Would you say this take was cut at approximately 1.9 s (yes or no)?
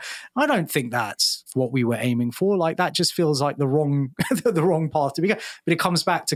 no